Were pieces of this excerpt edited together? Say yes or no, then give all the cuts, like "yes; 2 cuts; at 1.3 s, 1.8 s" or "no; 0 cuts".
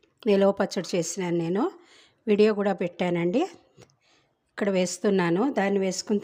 no; 0 cuts